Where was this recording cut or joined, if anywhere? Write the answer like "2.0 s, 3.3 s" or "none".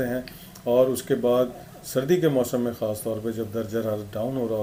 none